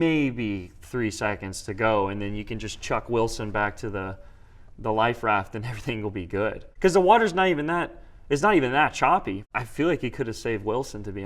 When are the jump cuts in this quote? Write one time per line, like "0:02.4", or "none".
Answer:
0:09.4